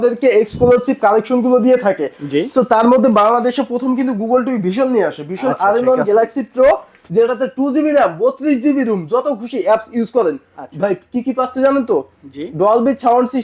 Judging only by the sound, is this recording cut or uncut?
uncut